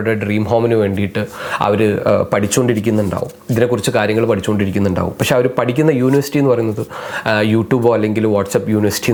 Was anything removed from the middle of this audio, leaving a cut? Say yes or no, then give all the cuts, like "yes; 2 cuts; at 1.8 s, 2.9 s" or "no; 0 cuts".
no; 0 cuts